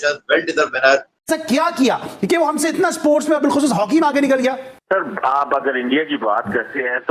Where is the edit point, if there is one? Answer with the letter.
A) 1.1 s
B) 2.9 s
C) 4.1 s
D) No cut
A